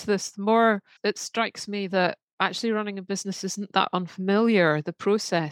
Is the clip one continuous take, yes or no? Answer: no